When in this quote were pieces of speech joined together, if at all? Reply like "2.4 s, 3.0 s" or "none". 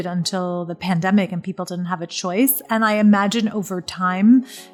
none